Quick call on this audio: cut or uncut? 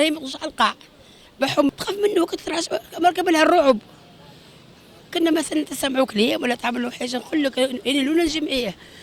cut